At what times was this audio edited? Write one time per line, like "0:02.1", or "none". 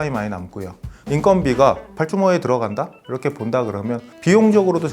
0:01.0
0:01.9
0:03.0
0:04.1